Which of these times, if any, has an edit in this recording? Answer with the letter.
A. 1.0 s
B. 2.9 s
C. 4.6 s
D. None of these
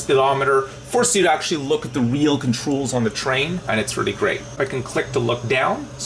C